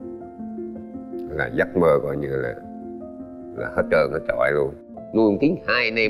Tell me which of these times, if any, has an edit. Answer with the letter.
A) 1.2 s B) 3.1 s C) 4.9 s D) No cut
C